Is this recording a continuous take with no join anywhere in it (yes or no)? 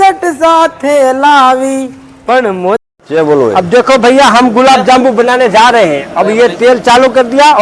no